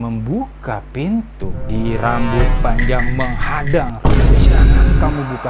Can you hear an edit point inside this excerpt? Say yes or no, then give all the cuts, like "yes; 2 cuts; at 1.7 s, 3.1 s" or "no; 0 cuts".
no; 0 cuts